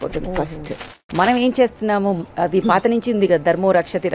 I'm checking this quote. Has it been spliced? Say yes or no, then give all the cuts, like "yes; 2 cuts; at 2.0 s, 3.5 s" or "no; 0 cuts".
yes; 1 cut; at 1.0 s